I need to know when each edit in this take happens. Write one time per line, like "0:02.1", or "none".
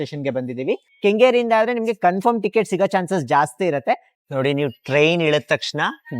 0:00.9
0:04.1